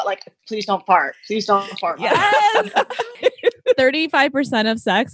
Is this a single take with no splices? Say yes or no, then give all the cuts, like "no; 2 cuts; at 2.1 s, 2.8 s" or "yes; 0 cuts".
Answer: no; 1 cut; at 3.2 s